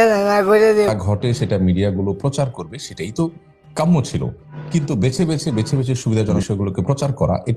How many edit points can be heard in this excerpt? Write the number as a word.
two